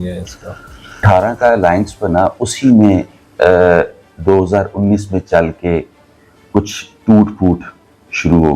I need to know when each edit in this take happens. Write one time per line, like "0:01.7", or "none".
0:01.0